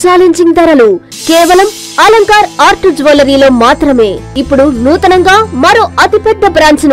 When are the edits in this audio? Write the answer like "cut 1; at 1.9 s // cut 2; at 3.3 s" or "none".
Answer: cut 1; at 4.3 s